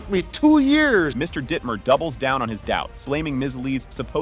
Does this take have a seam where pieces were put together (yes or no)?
no